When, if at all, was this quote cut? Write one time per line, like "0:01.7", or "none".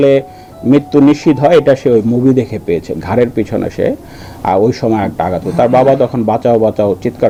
none